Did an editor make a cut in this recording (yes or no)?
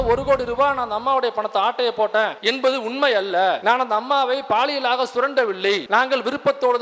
yes